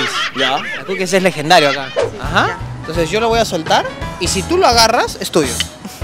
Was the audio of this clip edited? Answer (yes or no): yes